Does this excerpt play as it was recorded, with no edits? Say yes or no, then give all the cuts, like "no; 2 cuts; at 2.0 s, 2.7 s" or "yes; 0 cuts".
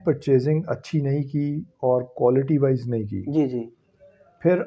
yes; 0 cuts